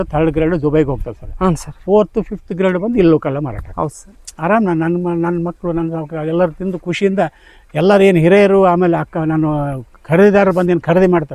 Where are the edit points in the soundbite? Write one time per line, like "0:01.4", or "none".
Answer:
0:03.6

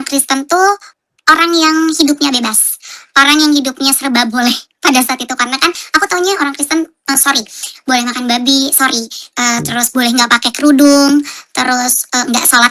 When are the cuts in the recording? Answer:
none

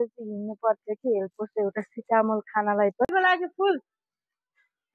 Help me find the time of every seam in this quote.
0:03.0

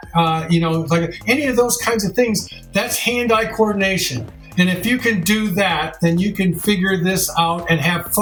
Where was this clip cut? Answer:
none

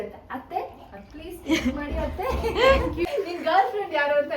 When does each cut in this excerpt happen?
0:03.1

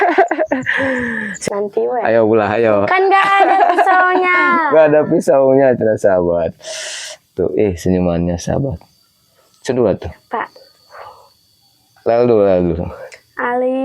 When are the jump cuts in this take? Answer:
0:01.3

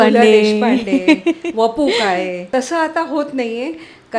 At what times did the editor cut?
0:02.4

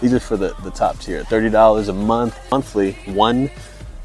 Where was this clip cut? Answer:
0:02.5

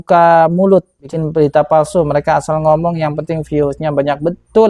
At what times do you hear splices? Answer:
0:01.0

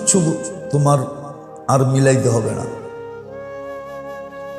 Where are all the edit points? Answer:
0:02.7

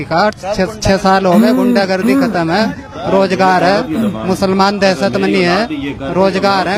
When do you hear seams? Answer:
none

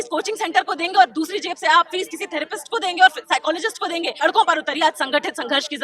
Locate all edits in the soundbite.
0:04.2

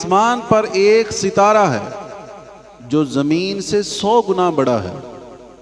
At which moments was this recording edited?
none

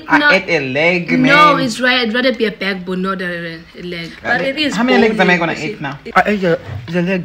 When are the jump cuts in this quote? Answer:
0:05.9

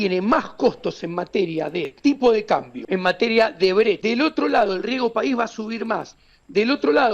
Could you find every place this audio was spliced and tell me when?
0:01.9
0:02.8
0:04.0

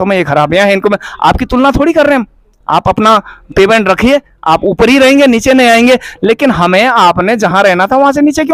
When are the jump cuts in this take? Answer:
none

